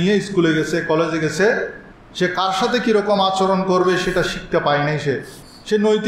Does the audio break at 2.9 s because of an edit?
no; 0 cuts

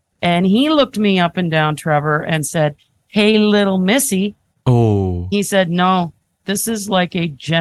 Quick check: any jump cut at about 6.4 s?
yes; 2 cuts; at 5.3 s, 6.4 s

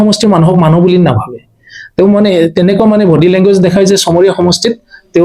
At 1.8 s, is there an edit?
no; 0 cuts

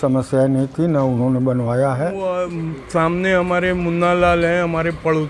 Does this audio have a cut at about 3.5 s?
no; 1 cut; at 2.2 s

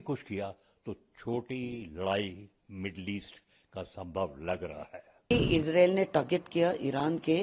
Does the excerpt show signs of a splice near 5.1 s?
yes; 1 cut; at 5.1 s

